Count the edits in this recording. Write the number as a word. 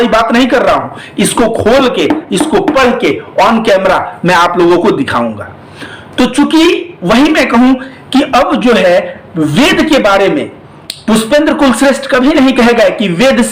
zero